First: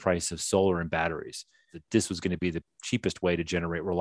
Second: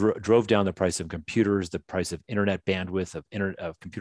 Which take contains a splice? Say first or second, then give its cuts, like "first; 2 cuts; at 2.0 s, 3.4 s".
first; 1 cut; at 1.8 s